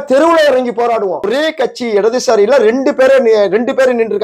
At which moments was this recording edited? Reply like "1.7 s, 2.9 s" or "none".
1.3 s